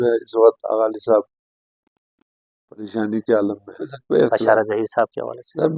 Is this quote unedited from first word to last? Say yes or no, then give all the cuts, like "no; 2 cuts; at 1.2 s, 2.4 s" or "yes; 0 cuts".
no; 1 cut; at 3.9 s